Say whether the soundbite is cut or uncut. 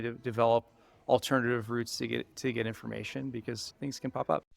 cut